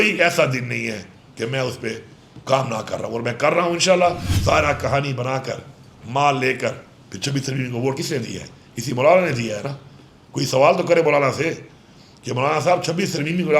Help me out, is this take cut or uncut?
cut